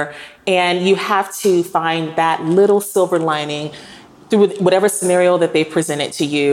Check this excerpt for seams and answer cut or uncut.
uncut